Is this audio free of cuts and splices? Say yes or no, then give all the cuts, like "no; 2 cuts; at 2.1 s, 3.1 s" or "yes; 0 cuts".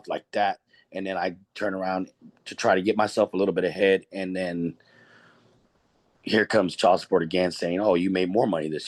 yes; 0 cuts